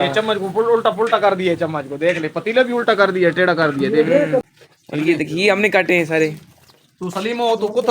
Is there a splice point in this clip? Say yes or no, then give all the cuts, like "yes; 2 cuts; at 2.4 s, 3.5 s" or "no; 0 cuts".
yes; 1 cut; at 4.5 s